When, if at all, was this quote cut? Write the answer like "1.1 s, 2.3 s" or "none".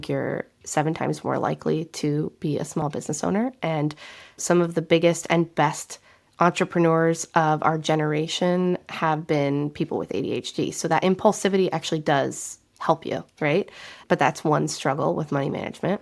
none